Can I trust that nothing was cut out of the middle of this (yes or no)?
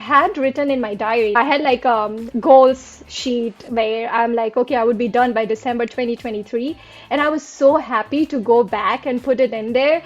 no